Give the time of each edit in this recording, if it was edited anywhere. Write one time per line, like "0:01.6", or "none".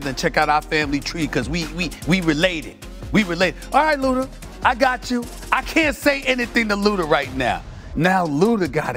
none